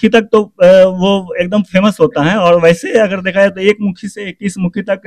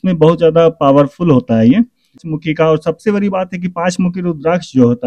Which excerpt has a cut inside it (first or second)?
second